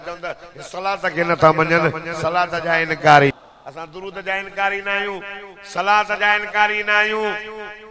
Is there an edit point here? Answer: yes; 1 cut; at 3.3 s

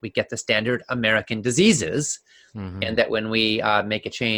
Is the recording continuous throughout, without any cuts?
yes; 0 cuts

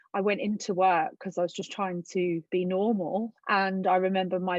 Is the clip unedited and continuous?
no; 2 cuts; at 2.4 s, 3.4 s

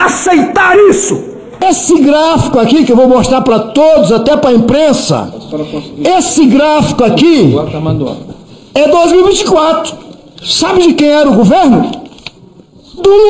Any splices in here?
yes; 1 cut; at 1.6 s

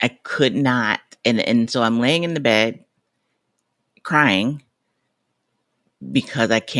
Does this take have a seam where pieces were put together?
no; 0 cuts

